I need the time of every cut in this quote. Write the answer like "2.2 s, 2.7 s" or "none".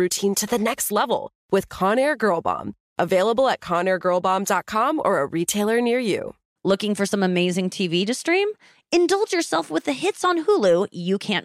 6.4 s